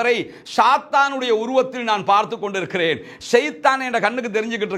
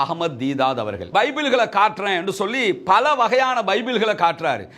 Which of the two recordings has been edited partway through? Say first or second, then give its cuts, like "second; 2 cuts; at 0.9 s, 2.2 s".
second; 1 cut; at 1.1 s